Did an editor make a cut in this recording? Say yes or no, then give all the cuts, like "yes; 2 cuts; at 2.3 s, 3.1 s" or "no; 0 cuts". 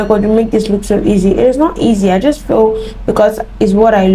no; 0 cuts